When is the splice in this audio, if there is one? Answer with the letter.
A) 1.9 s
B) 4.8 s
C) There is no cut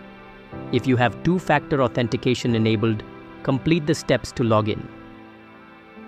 B